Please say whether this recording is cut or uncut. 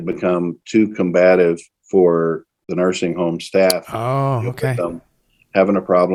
uncut